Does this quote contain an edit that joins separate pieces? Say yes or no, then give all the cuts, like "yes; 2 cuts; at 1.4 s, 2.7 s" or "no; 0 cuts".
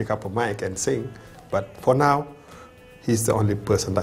no; 0 cuts